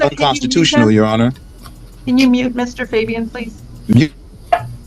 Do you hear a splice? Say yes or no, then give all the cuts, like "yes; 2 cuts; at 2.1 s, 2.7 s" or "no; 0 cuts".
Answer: yes; 1 cut; at 1.5 s